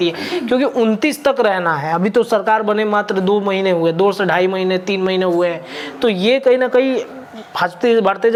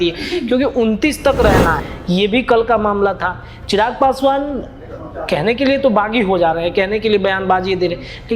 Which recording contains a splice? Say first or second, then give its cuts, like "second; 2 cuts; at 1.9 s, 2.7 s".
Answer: second; 1 cut; at 1.8 s